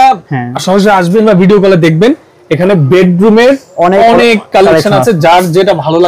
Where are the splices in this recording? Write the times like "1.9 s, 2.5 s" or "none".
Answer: none

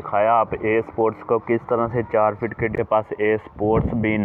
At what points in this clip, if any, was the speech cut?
2.8 s

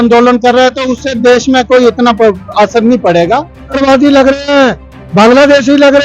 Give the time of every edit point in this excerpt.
3.8 s

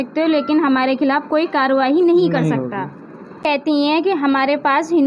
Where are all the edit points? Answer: 3.4 s

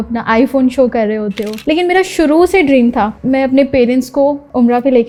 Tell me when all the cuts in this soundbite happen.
none

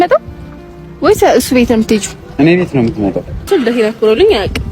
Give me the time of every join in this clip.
3.5 s

